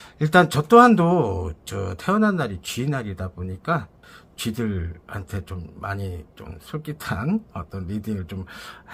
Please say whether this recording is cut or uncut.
uncut